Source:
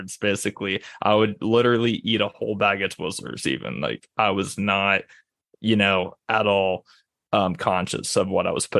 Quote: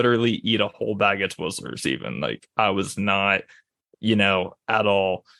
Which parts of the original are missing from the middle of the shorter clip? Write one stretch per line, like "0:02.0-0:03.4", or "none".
none